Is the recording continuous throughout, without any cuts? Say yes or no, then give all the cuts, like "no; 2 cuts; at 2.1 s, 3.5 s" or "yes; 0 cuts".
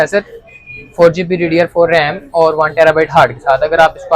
yes; 0 cuts